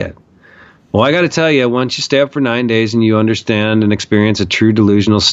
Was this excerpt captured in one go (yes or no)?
yes